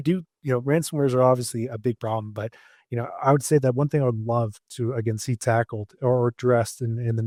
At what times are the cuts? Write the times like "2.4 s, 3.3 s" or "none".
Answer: none